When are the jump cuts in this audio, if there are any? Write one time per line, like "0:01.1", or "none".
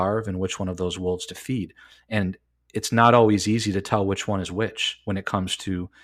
none